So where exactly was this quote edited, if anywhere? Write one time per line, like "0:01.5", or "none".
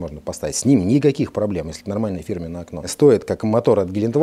0:02.9